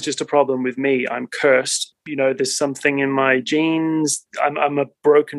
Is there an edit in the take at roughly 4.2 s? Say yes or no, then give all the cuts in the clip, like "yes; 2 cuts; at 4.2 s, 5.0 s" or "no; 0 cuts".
yes; 2 cuts; at 2.0 s, 4.2 s